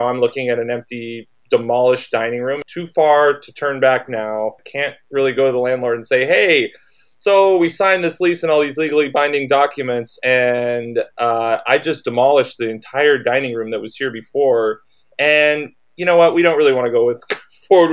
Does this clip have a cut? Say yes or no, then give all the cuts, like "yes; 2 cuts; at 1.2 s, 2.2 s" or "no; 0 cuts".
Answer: yes; 2 cuts; at 2.7 s, 4.6 s